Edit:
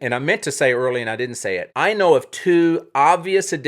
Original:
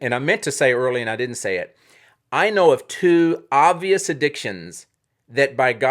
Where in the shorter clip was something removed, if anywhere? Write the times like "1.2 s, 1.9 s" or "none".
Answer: 1.7 s